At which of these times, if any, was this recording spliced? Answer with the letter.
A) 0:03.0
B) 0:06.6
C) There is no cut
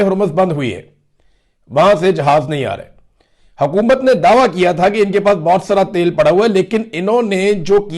C